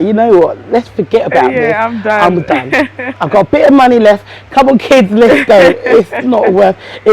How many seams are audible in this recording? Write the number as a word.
zero